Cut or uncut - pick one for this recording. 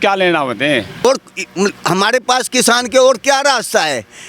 cut